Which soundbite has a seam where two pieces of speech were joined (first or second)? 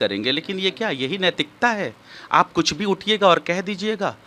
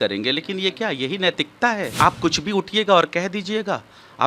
second